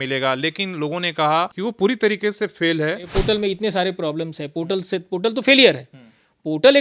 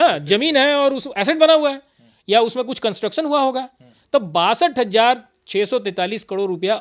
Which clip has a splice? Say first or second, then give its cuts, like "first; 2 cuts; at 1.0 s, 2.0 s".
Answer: first; 2 cuts; at 1.5 s, 3.1 s